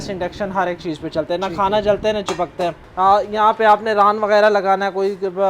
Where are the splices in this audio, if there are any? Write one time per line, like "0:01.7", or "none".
0:02.8